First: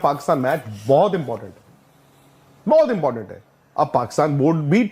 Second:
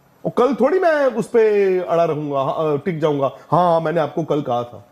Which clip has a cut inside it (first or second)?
first